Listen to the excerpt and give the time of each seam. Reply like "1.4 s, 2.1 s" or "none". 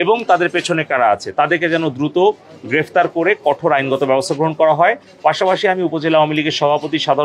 none

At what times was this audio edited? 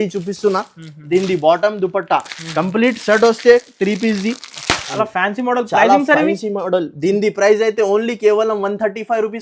4.9 s

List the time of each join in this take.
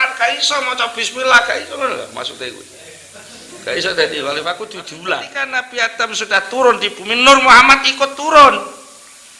5.7 s

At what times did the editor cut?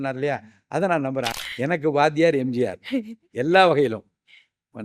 1.3 s

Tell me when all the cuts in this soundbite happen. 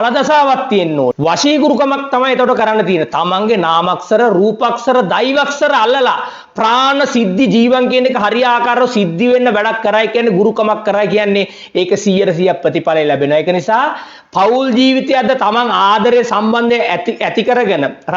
none

